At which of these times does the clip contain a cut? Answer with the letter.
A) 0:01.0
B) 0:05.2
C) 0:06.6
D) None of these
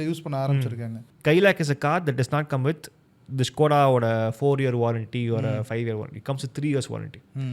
A